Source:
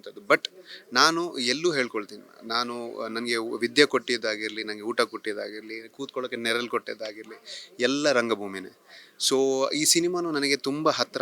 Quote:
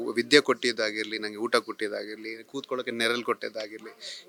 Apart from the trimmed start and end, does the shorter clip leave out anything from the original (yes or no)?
no